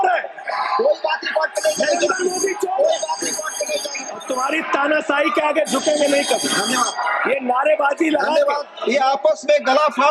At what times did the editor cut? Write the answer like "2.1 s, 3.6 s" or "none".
4.2 s, 8.7 s

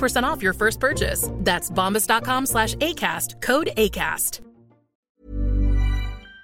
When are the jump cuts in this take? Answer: 5.0 s

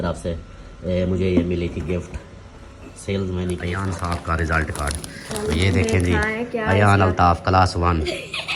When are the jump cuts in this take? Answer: 3.8 s

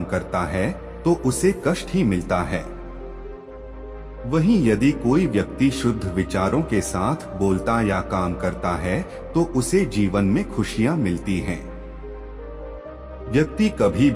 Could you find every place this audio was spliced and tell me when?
2.7 s, 4.0 s

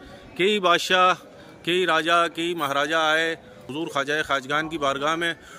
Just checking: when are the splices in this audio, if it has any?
none

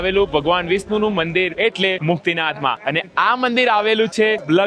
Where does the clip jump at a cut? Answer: 2.8 s

